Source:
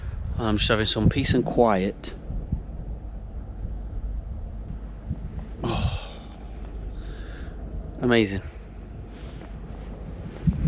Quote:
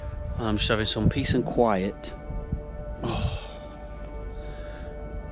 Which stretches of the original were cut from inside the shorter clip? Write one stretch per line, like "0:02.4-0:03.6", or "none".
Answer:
0:02.9-0:05.5